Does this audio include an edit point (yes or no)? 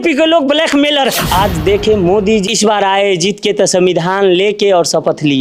yes